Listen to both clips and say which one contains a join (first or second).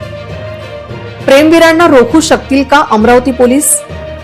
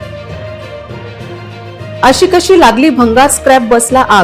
first